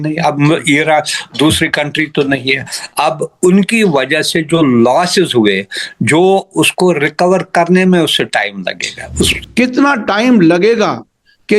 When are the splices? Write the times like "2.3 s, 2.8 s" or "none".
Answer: 9.4 s